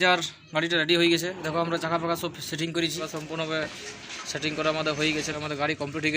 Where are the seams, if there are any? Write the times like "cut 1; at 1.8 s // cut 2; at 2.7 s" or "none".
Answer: cut 1; at 3.0 s // cut 2; at 5.2 s